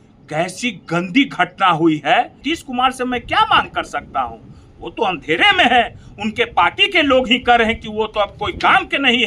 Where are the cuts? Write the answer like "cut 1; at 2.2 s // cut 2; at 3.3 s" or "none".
cut 1; at 2.4 s